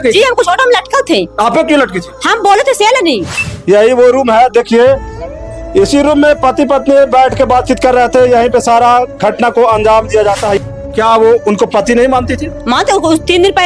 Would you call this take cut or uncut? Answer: cut